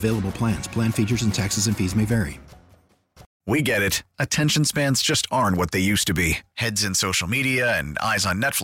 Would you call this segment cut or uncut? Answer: cut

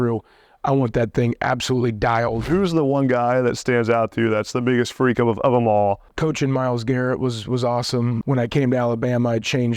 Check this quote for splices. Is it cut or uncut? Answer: cut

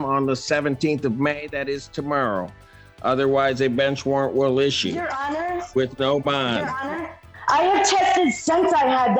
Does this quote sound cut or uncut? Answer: cut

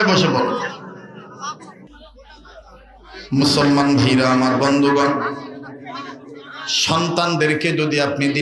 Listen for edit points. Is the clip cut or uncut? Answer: uncut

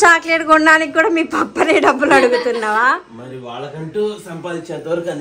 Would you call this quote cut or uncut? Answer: uncut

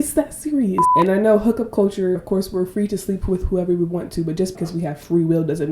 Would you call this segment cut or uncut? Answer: cut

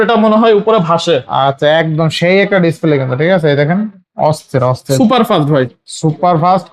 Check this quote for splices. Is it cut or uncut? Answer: uncut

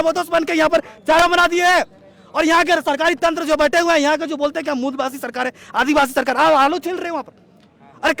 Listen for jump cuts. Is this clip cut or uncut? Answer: cut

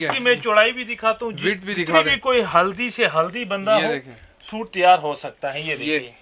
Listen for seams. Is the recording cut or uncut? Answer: uncut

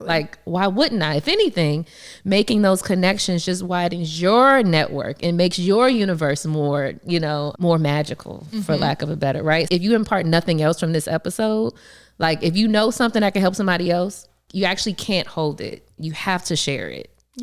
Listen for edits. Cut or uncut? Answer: cut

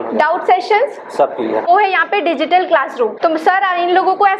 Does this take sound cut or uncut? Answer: cut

